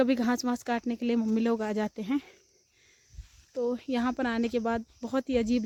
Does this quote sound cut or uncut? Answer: uncut